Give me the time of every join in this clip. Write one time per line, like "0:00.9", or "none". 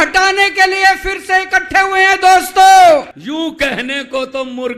0:03.1